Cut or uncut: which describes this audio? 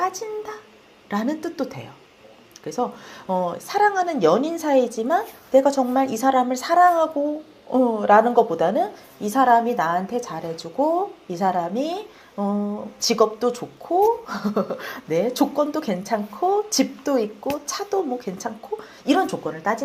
uncut